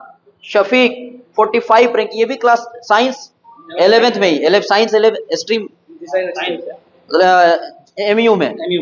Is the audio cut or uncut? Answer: uncut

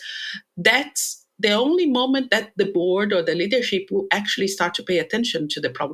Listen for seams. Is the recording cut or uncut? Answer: uncut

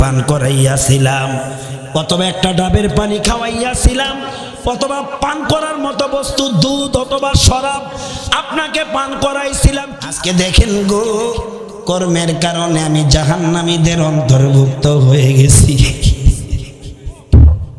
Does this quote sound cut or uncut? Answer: cut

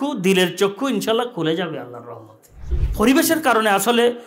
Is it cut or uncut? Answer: cut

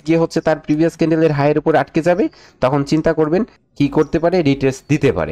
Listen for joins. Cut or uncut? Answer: cut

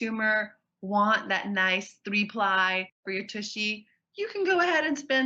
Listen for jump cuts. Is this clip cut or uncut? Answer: cut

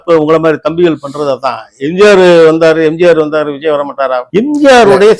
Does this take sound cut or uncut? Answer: cut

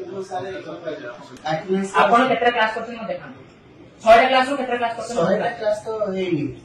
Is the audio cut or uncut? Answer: cut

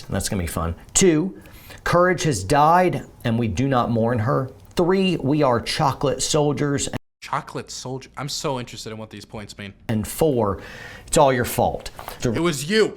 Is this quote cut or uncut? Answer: cut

